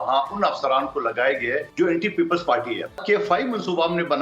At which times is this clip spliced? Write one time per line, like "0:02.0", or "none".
0:01.7
0:03.0